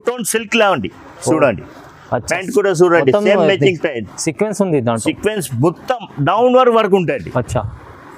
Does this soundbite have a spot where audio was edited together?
no; 0 cuts

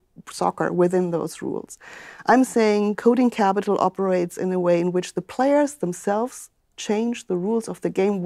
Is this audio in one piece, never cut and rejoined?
yes; 0 cuts

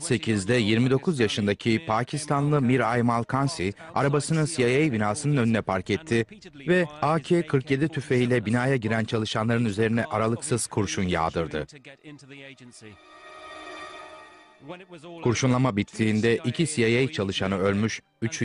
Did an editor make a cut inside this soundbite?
yes; 1 cut; at 8.0 s

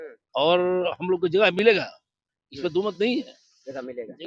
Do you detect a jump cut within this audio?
no; 0 cuts

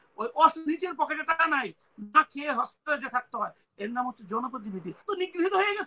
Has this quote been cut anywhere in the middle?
yes; 1 cut; at 4.9 s

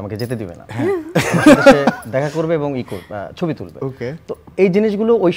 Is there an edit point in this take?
no; 0 cuts

